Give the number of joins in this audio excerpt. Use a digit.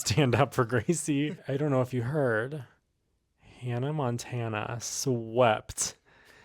1